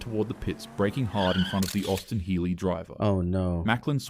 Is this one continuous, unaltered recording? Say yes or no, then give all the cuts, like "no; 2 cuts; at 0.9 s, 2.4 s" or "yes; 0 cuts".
yes; 0 cuts